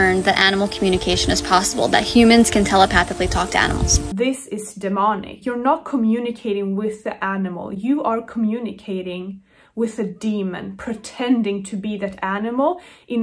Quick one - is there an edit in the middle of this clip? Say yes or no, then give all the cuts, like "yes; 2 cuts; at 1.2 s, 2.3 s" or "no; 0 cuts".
yes; 2 cuts; at 4.0 s, 5.3 s